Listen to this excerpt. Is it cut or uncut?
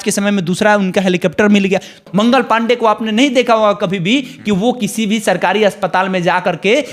cut